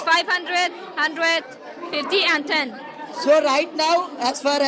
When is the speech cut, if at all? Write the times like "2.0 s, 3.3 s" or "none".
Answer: none